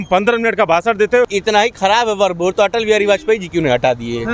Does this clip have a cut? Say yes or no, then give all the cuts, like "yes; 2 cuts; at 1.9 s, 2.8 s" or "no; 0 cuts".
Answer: yes; 1 cut; at 1.3 s